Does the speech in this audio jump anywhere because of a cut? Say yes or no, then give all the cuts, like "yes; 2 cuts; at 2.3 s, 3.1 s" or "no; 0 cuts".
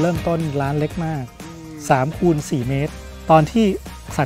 yes; 1 cut; at 3.0 s